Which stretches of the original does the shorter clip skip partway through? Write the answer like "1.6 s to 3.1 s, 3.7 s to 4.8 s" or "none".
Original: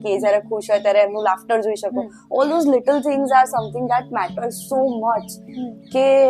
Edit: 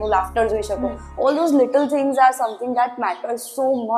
none